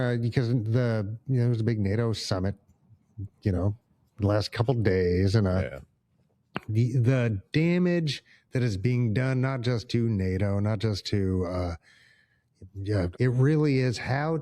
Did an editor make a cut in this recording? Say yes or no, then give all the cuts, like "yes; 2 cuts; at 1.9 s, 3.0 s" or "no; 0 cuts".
yes; 1 cut; at 13.1 s